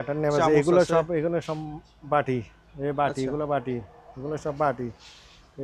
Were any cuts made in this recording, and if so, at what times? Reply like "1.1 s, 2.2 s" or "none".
none